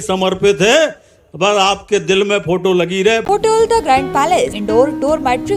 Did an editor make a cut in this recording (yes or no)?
yes